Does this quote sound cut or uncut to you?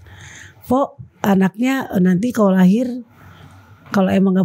uncut